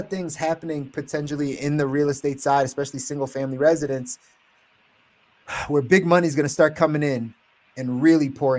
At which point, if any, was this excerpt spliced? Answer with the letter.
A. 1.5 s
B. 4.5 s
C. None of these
C